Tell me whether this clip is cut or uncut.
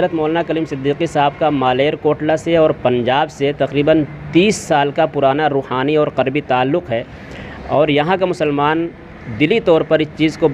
uncut